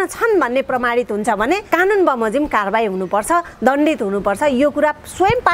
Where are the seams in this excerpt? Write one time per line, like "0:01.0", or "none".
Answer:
0:01.6